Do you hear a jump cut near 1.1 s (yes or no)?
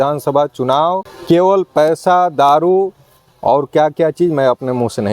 yes